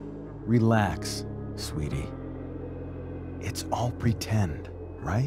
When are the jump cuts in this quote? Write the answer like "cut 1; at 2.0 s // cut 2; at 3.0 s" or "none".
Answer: none